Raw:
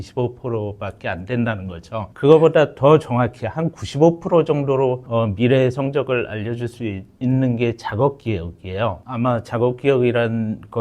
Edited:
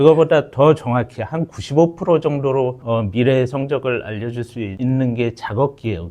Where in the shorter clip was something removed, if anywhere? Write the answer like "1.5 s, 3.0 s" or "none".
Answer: 4.7 s